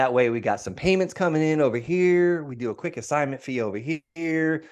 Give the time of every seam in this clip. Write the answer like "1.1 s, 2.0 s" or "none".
none